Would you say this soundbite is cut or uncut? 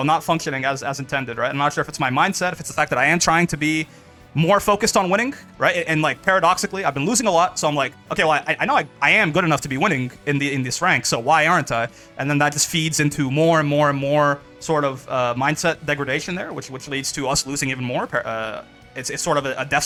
uncut